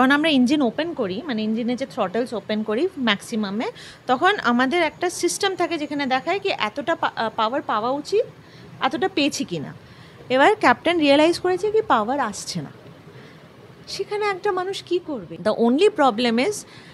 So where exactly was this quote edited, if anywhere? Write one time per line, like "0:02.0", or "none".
0:15.4